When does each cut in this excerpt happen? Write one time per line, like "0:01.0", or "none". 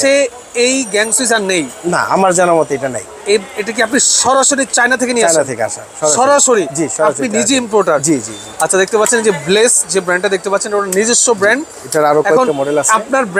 none